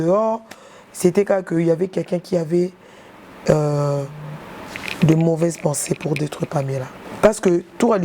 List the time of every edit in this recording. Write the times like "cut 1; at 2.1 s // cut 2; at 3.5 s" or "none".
cut 1; at 7.0 s

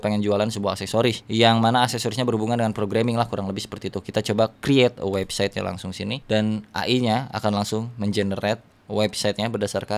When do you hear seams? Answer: none

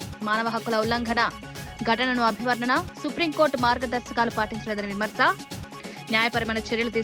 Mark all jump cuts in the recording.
none

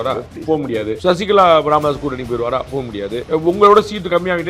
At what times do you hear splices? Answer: cut 1; at 1.0 s // cut 2; at 3.2 s

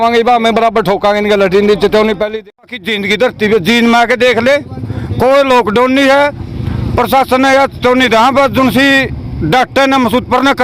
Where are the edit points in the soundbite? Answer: cut 1; at 2.6 s

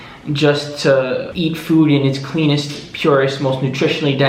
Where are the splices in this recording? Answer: cut 1; at 1.3 s

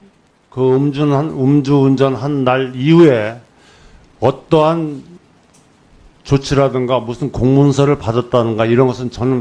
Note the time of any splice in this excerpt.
cut 1; at 3.4 s

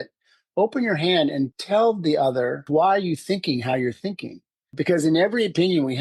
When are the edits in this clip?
cut 1; at 1.5 s // cut 2; at 2.6 s // cut 3; at 4.7 s

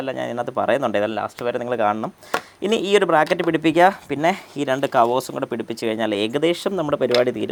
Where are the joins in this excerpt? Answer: none

